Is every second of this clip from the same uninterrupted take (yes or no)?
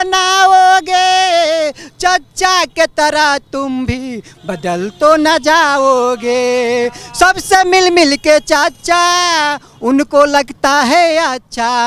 yes